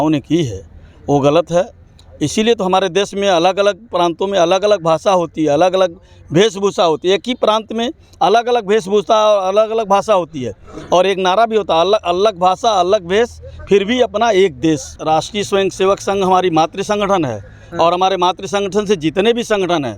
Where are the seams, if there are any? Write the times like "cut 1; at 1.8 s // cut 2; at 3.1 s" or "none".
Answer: cut 1; at 14.9 s